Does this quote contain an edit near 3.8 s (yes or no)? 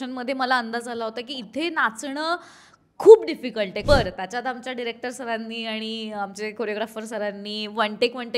yes